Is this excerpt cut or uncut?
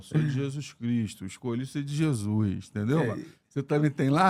uncut